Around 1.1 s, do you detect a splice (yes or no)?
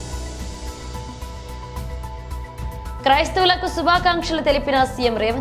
no